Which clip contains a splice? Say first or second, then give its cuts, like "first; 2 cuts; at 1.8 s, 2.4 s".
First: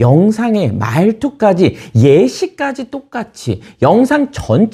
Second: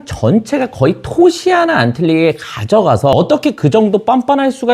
second; 1 cut; at 3.1 s